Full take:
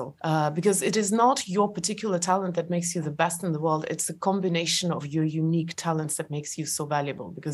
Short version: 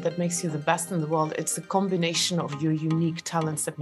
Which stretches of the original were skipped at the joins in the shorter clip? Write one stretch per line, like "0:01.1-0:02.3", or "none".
none